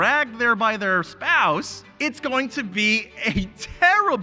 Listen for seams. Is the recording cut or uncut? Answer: cut